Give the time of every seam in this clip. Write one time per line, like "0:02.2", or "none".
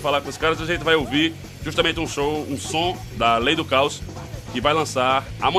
0:01.6